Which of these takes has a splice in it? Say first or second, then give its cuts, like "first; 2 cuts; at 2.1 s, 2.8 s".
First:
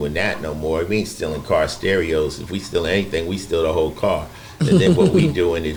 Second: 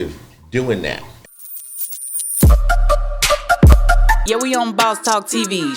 second; 1 cut; at 1.1 s